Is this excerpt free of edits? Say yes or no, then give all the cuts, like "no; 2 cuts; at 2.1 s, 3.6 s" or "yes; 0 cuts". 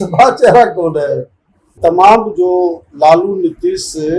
no; 1 cut; at 1.8 s